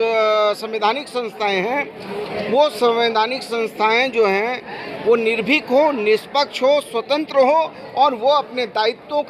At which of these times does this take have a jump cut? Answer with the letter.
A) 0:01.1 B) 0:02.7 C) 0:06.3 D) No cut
D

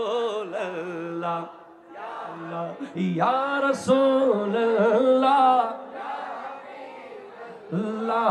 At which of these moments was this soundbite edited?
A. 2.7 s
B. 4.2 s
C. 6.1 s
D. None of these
A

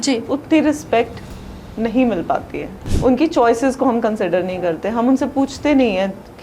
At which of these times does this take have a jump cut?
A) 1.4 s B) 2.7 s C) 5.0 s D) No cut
B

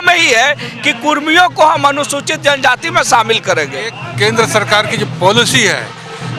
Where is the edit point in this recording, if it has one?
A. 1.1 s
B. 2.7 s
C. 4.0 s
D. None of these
C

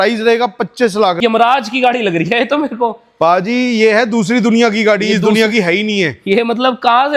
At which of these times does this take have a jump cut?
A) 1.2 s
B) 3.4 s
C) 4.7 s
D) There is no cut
A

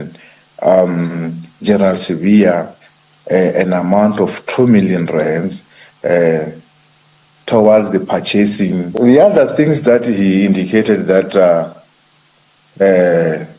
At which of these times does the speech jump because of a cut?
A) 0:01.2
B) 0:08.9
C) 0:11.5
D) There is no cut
B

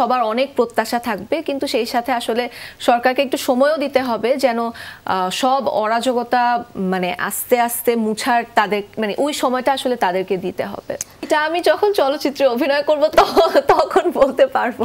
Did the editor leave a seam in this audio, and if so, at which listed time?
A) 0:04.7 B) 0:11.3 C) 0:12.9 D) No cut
B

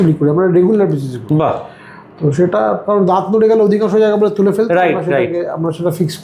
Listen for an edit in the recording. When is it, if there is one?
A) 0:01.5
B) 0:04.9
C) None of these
C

